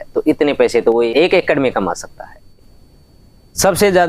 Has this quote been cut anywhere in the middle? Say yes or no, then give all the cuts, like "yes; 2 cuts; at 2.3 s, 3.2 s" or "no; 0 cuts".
yes; 2 cuts; at 1.1 s, 2.4 s